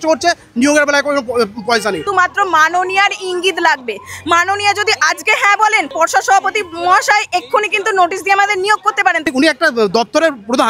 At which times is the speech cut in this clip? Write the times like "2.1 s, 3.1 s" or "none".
2.0 s, 5.9 s, 9.3 s